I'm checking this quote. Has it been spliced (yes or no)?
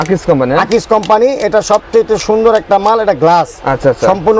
no